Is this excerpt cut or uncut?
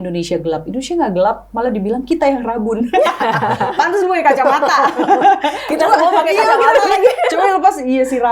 uncut